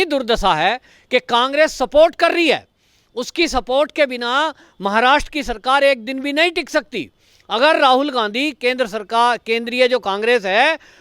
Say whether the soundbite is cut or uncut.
uncut